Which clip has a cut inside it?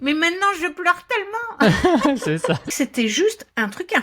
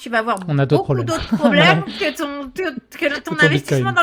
first; 1 cut; at 2.7 s

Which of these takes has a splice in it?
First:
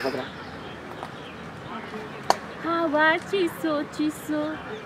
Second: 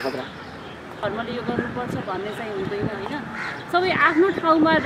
second; 1 cut; at 1.0 s

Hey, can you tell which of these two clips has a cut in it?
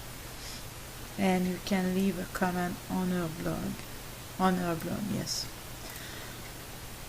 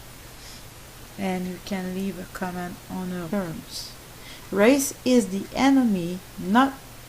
first; 1 cut; at 3.3 s

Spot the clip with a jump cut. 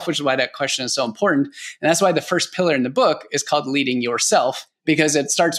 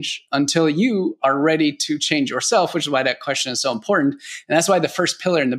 first; 1 cut; at 4.7 s

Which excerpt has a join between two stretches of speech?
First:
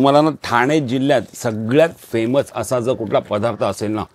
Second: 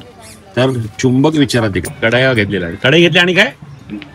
second; 1 cut; at 1.8 s

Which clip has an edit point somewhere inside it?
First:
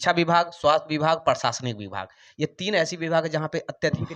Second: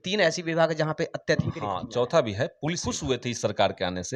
second; 1 cut; at 2.9 s

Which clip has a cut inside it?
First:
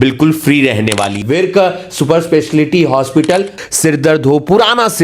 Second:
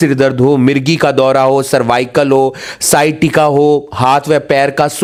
first; 2 cuts; at 1.2 s, 3.6 s

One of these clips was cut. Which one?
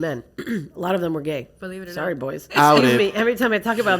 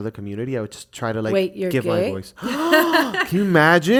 first; 1 cut; at 2.5 s

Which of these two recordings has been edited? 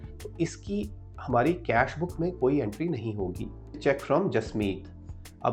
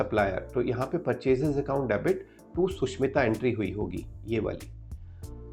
first; 1 cut; at 3.8 s

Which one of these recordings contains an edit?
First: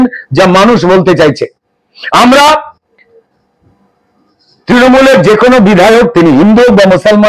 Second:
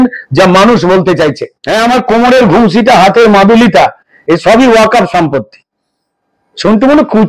second; 1 cut; at 1.5 s

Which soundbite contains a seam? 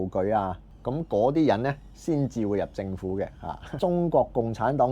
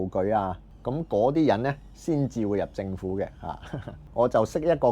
first; 1 cut; at 3.6 s

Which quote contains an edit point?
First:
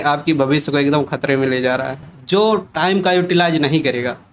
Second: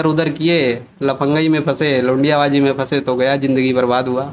first; 1 cut; at 2.1 s

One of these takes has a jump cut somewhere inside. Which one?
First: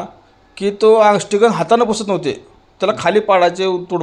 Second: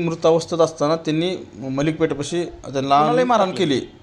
second; 1 cut; at 3.1 s

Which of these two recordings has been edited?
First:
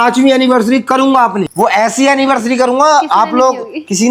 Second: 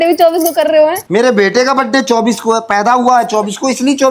second; 1 cut; at 1.0 s

